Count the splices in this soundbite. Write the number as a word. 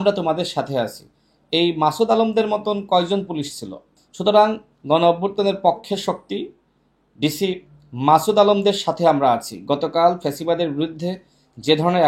zero